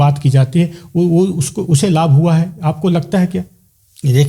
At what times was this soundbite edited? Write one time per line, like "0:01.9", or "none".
none